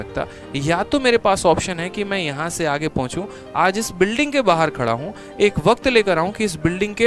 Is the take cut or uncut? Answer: uncut